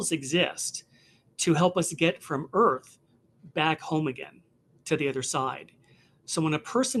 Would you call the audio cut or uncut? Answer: uncut